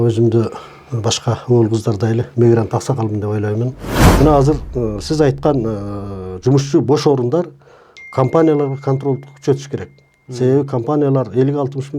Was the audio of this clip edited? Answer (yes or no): yes